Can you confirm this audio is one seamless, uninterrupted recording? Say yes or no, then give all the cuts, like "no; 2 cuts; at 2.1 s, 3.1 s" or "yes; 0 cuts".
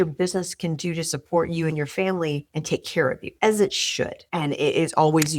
no; 1 cut; at 4.2 s